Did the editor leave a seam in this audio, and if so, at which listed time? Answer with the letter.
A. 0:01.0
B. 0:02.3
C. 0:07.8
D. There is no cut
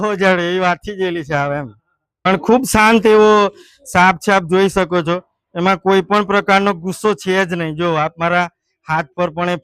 B